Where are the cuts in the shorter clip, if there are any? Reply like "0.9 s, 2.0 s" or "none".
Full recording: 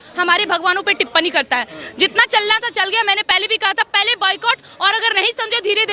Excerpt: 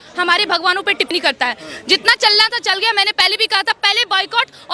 1.1 s